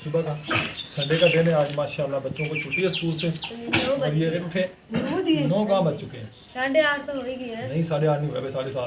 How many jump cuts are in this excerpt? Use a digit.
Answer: 1